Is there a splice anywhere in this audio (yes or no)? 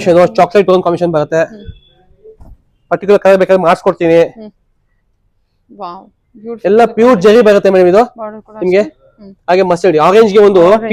no